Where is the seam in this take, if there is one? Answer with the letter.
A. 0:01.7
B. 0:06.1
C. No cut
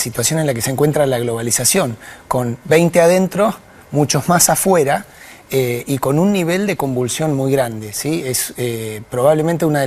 B